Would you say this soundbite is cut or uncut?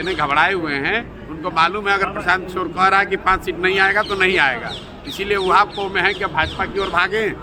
uncut